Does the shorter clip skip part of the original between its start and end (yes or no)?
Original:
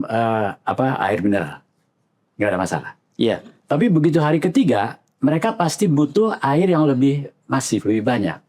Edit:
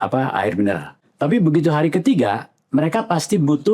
yes